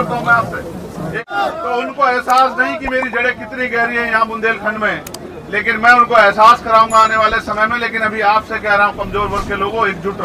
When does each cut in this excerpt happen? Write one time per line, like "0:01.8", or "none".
0:01.3